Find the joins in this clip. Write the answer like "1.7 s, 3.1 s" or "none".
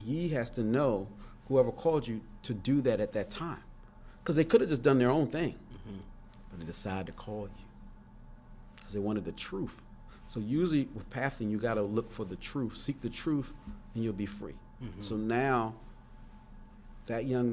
none